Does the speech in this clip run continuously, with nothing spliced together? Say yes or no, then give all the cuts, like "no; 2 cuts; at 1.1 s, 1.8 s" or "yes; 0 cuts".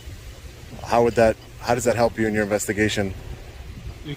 yes; 0 cuts